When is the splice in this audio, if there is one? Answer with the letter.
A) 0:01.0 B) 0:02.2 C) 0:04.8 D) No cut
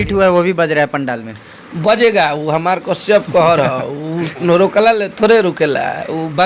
D